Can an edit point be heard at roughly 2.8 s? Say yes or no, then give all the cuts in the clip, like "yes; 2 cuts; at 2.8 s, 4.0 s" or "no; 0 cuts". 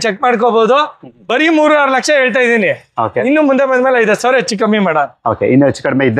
no; 0 cuts